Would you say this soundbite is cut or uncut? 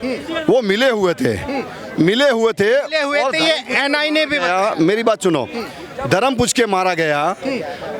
uncut